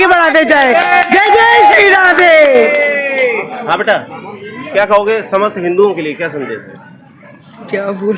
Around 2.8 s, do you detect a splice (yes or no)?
no